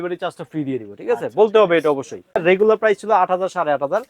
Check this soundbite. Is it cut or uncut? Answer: cut